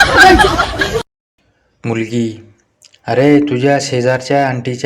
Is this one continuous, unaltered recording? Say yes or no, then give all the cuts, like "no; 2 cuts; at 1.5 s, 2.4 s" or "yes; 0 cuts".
no; 1 cut; at 1.3 s